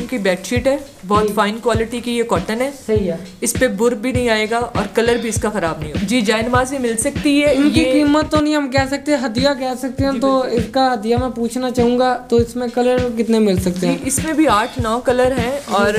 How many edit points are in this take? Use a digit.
1